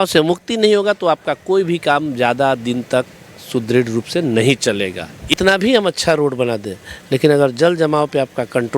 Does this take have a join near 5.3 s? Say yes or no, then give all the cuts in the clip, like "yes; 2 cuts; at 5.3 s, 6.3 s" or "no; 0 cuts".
yes; 1 cut; at 5.3 s